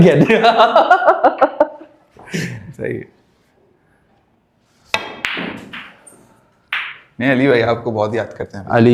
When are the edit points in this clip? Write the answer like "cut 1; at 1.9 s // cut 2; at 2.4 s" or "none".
none